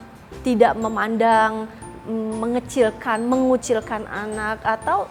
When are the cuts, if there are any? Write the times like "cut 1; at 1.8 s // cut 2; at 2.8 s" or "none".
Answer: none